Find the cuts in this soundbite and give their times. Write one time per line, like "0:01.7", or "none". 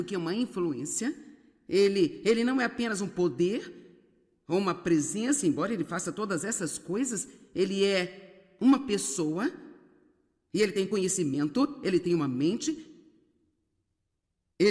none